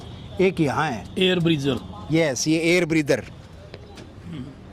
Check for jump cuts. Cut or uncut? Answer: uncut